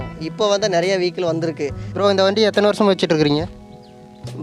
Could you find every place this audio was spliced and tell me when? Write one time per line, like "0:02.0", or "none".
0:01.8